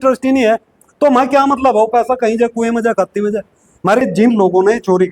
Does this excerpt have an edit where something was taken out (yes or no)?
yes